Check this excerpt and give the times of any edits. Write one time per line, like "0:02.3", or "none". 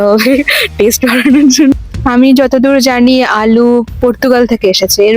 0:01.7